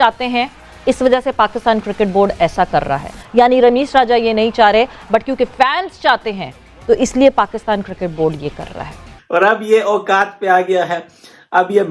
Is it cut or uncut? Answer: cut